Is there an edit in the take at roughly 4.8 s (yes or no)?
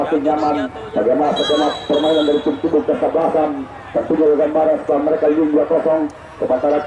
no